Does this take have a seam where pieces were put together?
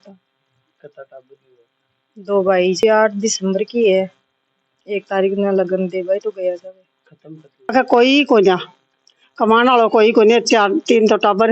yes; 2 cuts; at 2.8 s, 7.7 s

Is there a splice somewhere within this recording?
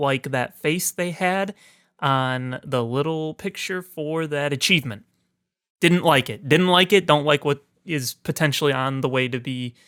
no; 0 cuts

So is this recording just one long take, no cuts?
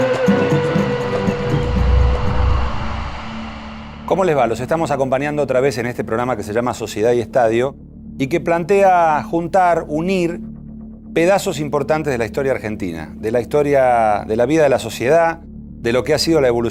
yes; 0 cuts

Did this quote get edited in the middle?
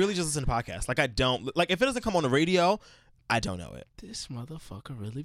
no; 0 cuts

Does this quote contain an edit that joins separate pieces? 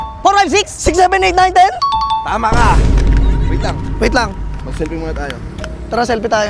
no; 0 cuts

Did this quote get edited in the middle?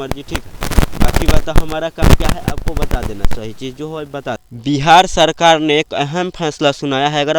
yes; 1 cut; at 4.7 s

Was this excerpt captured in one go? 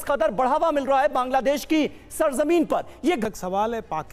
no; 1 cut; at 3.2 s

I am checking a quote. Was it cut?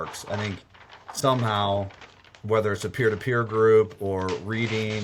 no; 0 cuts

